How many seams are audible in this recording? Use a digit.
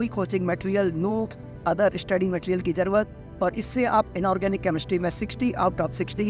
0